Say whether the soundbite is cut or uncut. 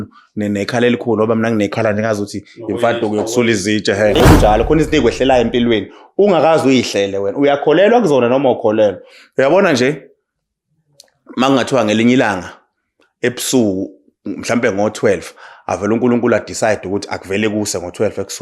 cut